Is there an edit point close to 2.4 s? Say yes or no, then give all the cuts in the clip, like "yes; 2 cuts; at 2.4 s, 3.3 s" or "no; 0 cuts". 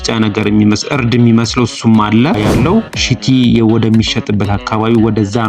yes; 1 cut; at 2.4 s